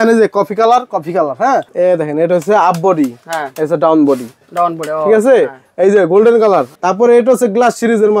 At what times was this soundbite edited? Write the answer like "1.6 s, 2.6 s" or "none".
1.7 s, 6.7 s